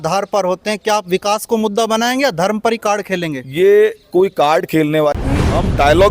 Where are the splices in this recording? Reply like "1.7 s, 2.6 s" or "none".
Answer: 5.2 s